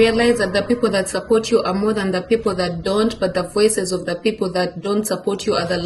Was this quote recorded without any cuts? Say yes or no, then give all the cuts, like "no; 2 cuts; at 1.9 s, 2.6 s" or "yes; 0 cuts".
yes; 0 cuts